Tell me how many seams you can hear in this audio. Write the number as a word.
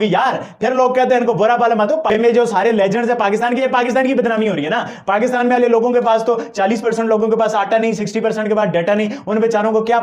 zero